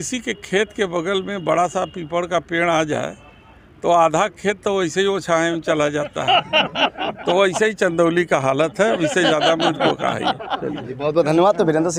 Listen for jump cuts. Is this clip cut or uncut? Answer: uncut